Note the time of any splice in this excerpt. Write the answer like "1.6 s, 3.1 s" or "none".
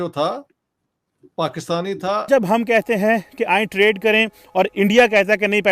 2.3 s